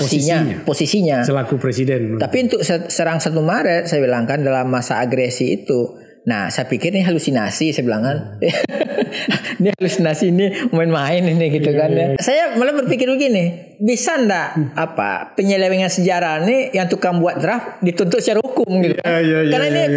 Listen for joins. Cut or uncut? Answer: cut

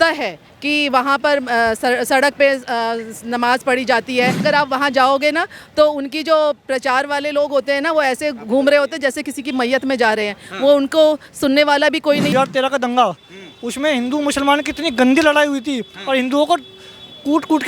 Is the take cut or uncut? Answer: cut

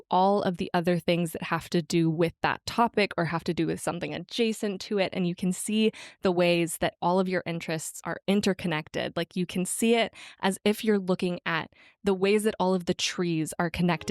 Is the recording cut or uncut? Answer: uncut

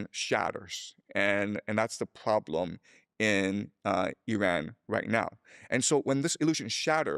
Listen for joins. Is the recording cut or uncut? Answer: uncut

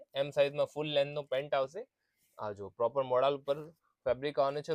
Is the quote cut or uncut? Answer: uncut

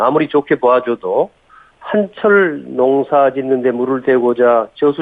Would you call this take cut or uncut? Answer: uncut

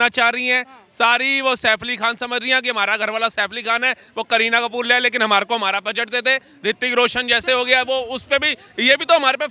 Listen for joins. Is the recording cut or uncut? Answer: uncut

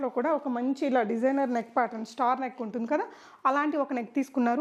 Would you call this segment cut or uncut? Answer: uncut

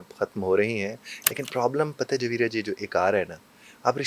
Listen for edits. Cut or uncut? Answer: uncut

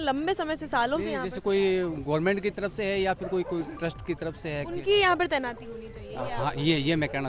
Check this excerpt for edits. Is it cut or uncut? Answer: uncut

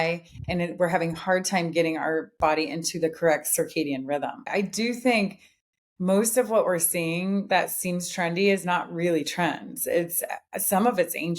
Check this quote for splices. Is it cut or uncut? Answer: cut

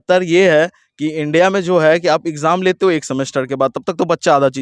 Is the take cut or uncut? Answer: uncut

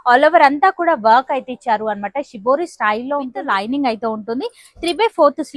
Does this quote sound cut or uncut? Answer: cut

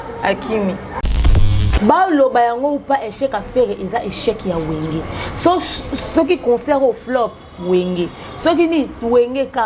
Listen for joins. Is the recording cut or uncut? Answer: cut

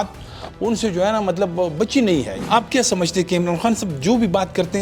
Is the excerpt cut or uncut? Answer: cut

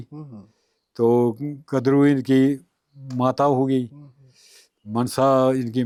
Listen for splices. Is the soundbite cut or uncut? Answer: uncut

